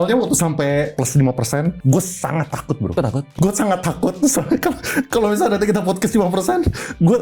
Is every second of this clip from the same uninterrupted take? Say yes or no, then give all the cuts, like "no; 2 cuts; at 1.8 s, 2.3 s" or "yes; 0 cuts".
no; 3 cuts; at 0.9 s, 1.8 s, 3.3 s